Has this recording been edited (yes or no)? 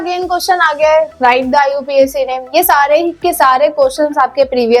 no